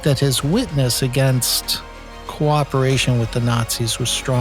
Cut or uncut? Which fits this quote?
uncut